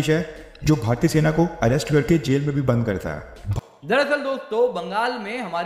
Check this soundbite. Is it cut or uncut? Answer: cut